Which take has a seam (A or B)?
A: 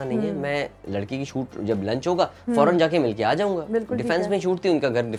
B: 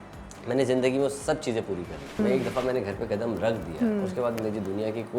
B